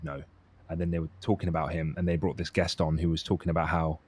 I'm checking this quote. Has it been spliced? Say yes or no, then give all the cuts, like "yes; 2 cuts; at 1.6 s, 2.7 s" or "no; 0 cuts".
no; 0 cuts